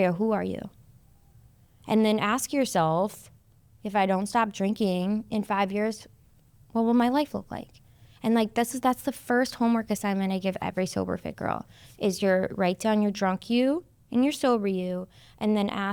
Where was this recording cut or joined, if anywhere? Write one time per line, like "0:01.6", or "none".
none